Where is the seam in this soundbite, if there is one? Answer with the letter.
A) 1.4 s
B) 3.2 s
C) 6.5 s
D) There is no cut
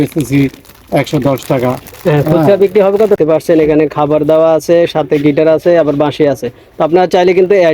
B